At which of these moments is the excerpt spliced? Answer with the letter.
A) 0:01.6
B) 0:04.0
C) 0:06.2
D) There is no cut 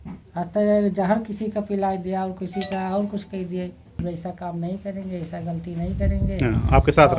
B